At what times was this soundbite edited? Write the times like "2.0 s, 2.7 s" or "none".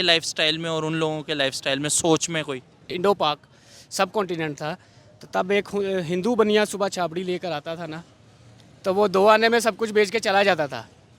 2.9 s

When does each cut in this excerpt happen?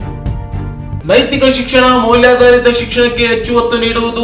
none

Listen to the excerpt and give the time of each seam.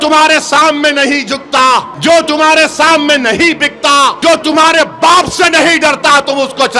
1.9 s, 4.2 s

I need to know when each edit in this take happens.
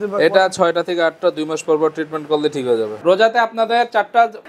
3.0 s

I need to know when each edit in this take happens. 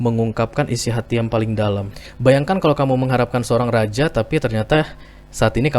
2.0 s

